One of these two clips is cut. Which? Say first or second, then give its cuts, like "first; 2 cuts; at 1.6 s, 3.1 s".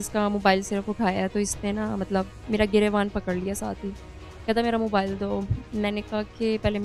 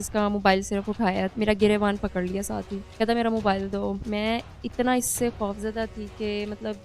second; 3 cuts; at 1.3 s, 2.8 s, 4.0 s